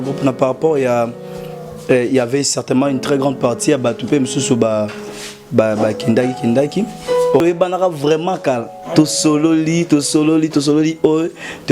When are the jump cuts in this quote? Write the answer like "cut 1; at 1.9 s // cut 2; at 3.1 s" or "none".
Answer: cut 1; at 7.4 s